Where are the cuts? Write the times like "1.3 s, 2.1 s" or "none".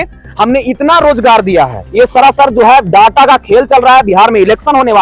1.8 s